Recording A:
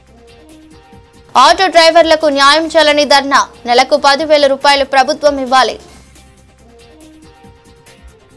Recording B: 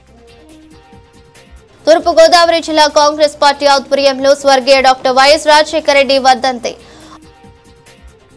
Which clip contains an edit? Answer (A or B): B